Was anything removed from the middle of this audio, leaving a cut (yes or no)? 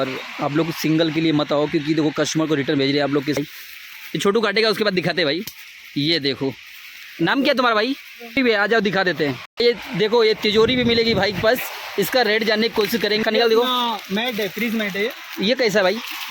yes